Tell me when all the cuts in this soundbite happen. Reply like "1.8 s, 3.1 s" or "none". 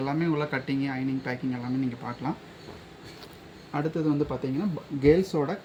none